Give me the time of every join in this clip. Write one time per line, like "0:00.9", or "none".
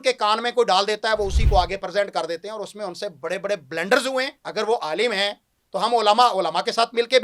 0:04.4